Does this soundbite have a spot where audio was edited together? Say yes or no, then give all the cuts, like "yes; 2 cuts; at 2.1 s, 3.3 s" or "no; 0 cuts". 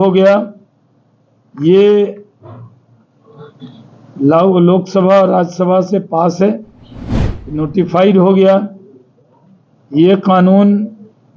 no; 0 cuts